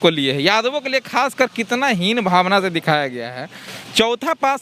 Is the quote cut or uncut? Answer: uncut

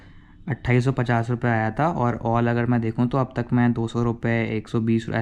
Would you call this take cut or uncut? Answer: uncut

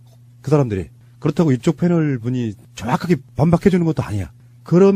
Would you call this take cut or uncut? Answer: cut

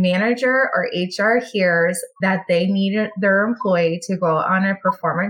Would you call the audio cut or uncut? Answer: cut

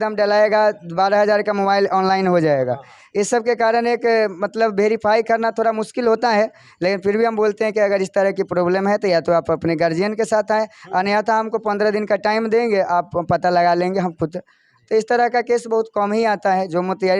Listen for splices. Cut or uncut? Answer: uncut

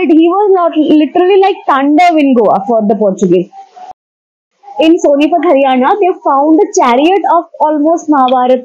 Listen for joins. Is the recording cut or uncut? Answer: cut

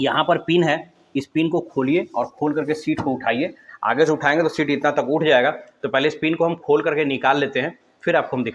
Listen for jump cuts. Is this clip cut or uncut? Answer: uncut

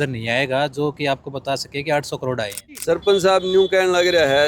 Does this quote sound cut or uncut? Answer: cut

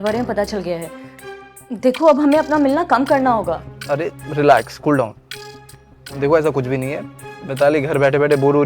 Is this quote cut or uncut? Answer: uncut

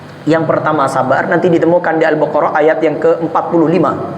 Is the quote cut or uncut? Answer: uncut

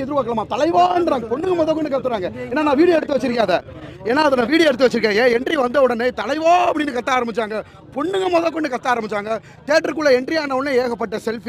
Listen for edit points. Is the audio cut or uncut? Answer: uncut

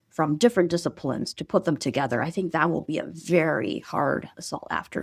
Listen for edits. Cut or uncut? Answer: uncut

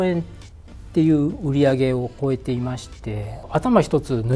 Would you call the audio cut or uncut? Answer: cut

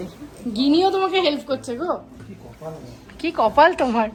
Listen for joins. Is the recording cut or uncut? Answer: uncut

